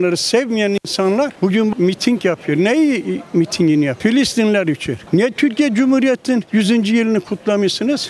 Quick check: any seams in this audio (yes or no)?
no